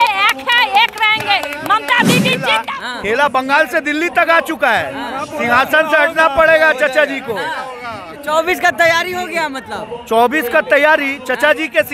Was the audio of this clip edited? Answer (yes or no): yes